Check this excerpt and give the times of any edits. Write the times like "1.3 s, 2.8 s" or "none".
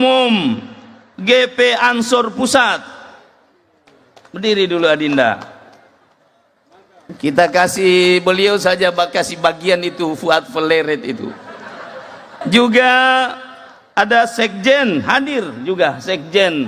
12.4 s

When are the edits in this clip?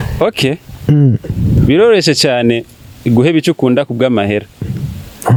none

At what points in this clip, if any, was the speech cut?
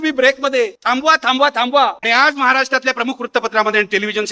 2.0 s

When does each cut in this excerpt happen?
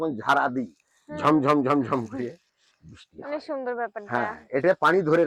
none

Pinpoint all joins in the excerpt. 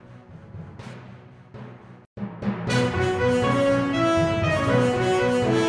none

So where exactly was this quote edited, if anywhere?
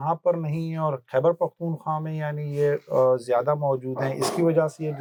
none

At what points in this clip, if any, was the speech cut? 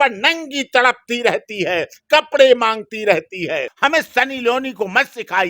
3.7 s

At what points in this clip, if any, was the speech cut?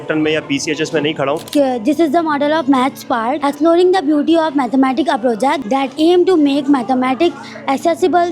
1.4 s, 3.4 s, 5.6 s

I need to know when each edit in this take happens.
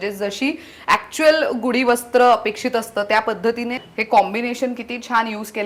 3.8 s

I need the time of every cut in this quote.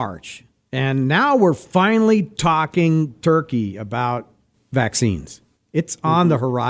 none

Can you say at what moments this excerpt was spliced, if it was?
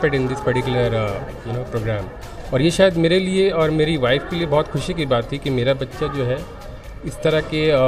none

